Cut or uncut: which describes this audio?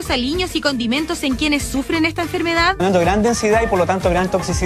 uncut